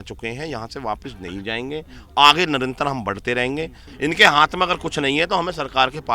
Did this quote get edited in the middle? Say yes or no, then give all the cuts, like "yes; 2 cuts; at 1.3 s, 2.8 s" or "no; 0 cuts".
yes; 1 cut; at 3.8 s